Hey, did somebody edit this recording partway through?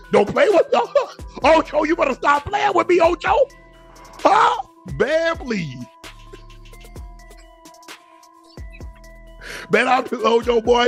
no; 0 cuts

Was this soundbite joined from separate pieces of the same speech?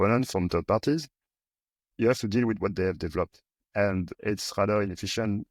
no; 0 cuts

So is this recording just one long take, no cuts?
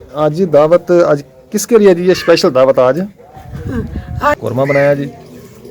no; 1 cut; at 4.4 s

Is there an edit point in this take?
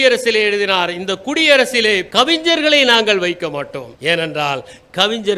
no; 0 cuts

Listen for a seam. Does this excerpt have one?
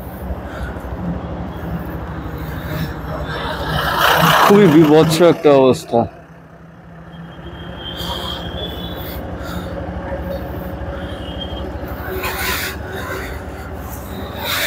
no; 0 cuts

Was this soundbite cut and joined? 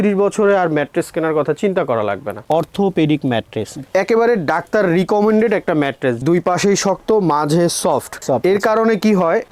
yes; 2 cuts; at 2.4 s, 8.1 s

